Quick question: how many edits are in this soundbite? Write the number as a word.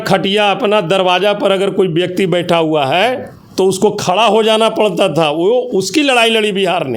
one